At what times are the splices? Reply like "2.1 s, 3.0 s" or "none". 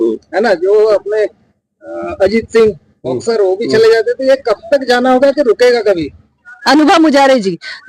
6.6 s